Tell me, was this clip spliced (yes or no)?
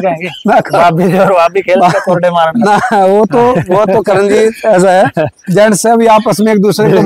no